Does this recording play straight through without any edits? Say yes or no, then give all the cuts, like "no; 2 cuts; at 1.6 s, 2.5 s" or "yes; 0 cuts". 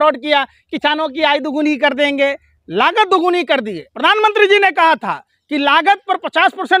no; 1 cut; at 3.8 s